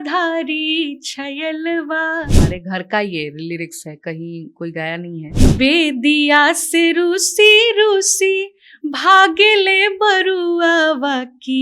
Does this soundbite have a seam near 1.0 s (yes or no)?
no